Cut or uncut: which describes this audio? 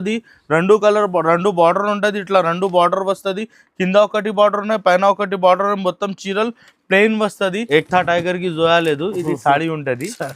cut